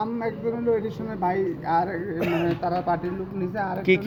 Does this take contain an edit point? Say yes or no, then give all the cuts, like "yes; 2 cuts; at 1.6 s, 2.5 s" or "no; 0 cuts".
no; 0 cuts